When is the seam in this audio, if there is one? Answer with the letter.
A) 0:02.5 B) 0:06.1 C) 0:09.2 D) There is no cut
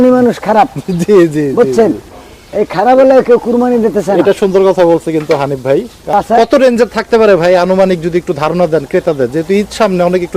B